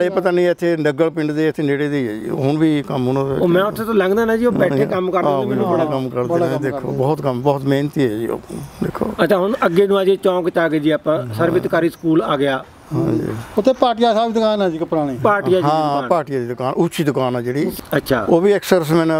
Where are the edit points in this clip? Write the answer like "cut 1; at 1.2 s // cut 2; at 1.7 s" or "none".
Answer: none